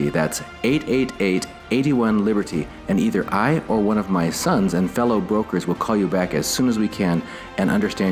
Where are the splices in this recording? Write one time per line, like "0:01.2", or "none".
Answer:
none

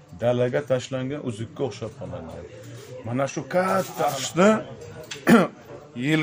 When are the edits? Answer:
0:04.2

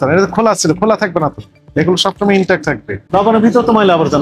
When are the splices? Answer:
0:02.9

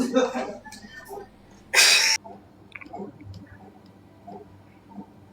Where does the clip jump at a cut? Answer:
0:02.2

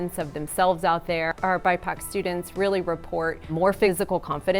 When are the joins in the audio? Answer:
0:01.3
0:03.7

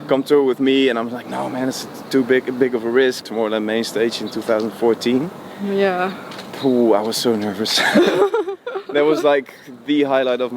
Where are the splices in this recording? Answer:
0:03.2

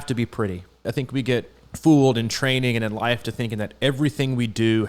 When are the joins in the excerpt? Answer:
0:00.8
0:01.6

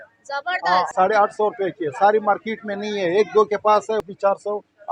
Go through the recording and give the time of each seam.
0:00.9
0:04.0

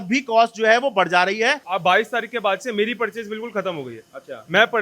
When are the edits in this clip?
0:01.7

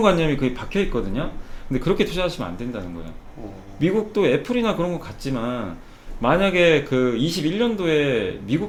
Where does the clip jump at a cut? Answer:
none

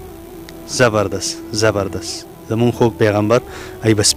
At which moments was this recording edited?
none

